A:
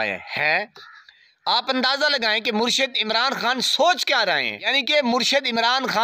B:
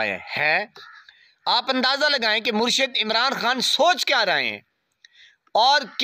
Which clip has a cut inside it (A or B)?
A